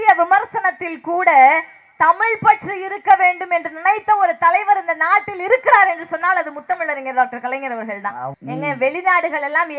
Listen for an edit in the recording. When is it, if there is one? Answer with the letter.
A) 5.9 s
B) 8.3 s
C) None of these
B